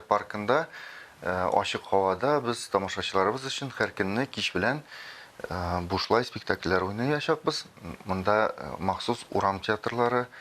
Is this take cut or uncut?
uncut